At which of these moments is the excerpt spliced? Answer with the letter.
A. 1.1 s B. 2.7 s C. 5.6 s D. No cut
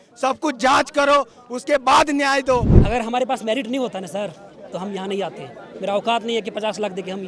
B